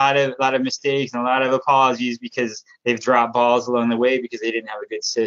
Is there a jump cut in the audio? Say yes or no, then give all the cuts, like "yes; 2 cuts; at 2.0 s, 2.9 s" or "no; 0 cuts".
no; 0 cuts